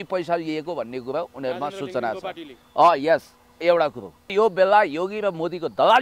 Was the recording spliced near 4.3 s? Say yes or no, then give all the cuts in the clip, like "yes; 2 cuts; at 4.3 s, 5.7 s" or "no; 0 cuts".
yes; 1 cut; at 4.3 s